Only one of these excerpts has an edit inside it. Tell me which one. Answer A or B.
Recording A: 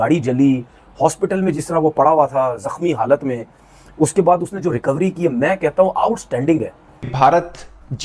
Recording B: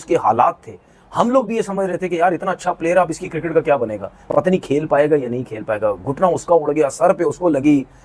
A